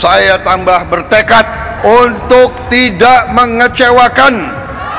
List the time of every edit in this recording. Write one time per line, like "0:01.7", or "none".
0:01.7